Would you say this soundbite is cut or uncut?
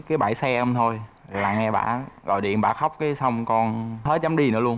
uncut